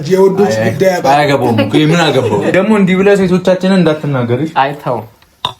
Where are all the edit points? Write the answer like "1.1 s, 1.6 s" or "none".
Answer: 2.5 s